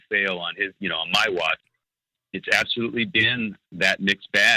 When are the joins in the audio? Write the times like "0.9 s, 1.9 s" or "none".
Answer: 1.6 s, 3.6 s